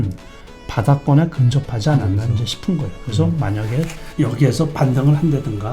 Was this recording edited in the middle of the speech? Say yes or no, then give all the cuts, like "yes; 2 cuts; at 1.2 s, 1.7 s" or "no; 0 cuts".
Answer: yes; 1 cut; at 4.0 s